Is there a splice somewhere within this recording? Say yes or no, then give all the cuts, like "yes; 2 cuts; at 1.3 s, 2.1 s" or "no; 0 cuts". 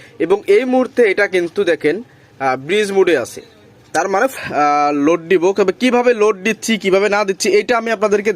yes; 1 cut; at 4.3 s